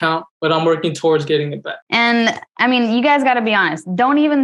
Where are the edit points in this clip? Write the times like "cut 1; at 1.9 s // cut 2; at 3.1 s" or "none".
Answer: none